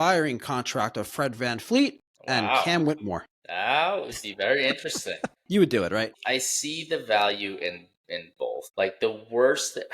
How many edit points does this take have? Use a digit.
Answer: 4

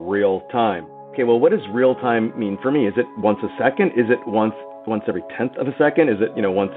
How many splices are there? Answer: 1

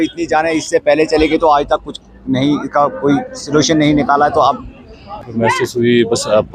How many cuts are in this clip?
1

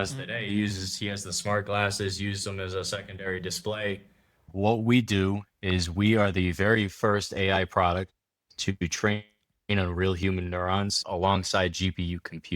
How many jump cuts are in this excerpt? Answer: 2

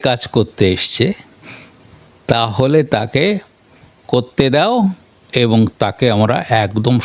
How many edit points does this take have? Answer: 0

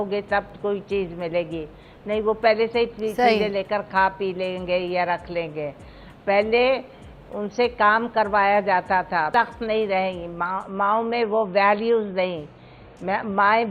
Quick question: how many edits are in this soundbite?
1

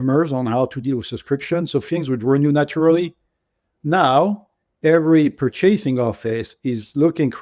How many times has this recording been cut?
0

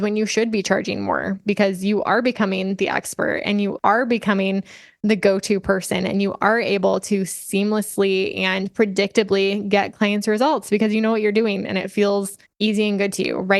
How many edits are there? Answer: 2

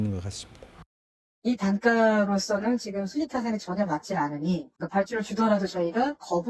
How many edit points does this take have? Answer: 1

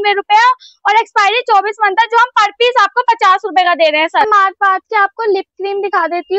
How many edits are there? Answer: 1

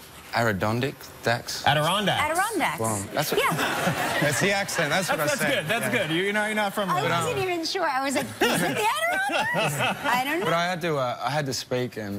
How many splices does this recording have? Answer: 1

